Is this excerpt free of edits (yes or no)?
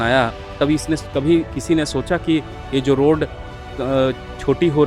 yes